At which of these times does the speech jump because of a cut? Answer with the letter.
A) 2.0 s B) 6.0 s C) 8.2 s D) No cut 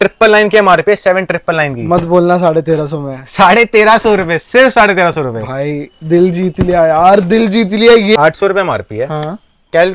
C